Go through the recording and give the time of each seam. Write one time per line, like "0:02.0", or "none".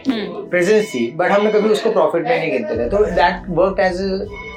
none